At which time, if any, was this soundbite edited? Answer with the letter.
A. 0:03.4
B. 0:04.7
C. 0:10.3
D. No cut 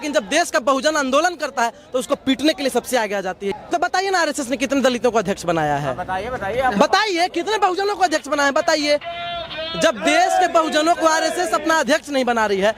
A